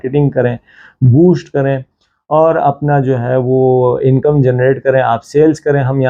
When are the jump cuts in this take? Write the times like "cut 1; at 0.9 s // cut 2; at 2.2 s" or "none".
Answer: none